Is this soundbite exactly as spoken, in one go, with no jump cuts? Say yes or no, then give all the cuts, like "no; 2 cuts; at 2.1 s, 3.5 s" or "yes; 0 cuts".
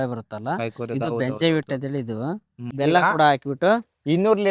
no; 1 cut; at 2.6 s